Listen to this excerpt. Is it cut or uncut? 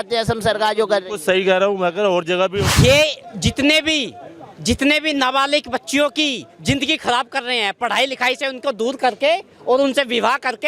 cut